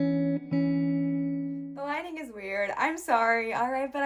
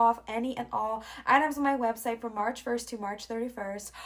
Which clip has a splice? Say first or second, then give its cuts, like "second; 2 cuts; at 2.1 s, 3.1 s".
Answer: first; 1 cut; at 1.6 s